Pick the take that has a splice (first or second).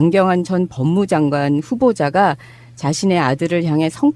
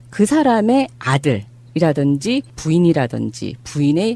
first